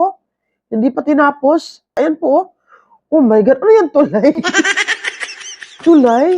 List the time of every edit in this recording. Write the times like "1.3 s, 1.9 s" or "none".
1.9 s